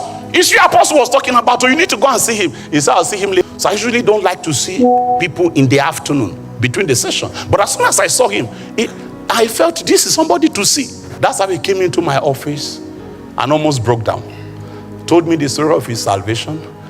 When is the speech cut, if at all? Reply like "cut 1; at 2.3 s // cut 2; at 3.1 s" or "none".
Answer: cut 1; at 3.4 s // cut 2; at 11.0 s